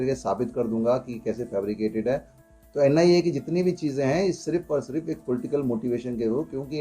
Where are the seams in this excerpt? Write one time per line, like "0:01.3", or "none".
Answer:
0:02.3